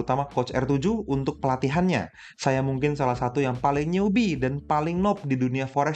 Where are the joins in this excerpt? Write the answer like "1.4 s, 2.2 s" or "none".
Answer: none